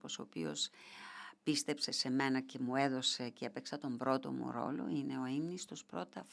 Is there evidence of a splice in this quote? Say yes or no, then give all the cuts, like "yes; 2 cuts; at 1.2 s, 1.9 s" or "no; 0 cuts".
no; 0 cuts